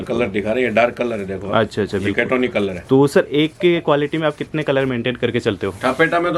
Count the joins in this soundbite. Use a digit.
0